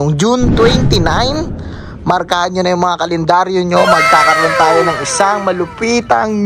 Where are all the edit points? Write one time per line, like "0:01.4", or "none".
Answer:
none